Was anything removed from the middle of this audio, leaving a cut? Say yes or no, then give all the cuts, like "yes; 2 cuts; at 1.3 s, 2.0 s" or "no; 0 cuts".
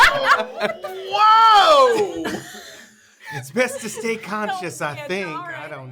no; 0 cuts